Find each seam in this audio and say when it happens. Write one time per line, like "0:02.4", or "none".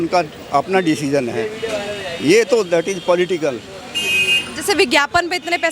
none